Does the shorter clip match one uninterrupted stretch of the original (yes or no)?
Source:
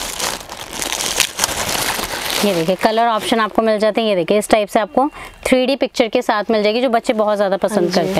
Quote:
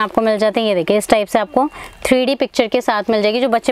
yes